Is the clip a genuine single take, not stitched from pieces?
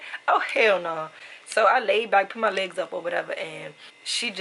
yes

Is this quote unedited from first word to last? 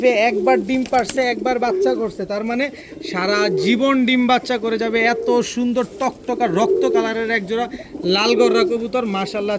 yes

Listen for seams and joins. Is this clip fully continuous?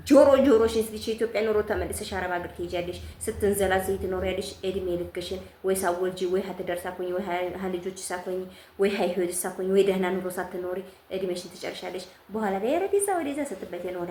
yes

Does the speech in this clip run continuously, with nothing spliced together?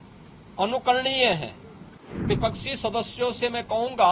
no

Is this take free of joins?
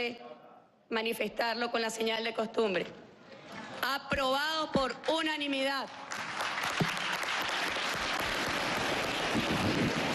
yes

